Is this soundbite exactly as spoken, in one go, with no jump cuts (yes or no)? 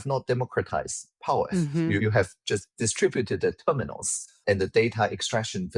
yes